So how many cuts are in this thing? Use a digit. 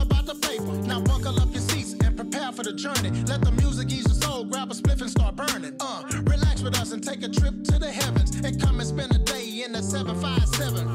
0